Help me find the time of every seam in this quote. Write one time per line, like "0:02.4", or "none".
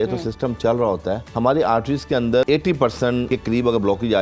0:01.2
0:02.4
0:03.3